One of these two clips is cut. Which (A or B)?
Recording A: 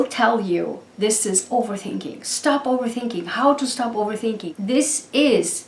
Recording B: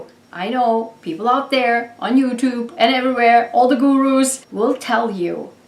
A